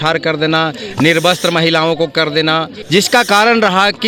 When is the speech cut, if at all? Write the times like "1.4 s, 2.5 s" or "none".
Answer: 2.7 s